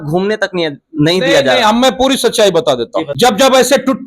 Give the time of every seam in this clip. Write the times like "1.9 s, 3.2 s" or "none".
3.0 s